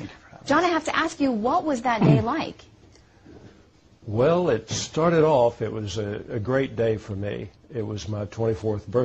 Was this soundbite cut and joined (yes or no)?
yes